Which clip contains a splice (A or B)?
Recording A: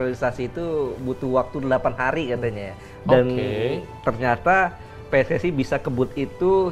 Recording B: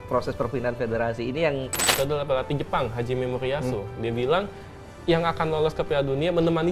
B